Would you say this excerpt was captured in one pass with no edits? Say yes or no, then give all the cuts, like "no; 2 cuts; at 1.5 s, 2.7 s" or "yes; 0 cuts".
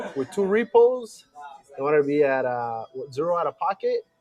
yes; 0 cuts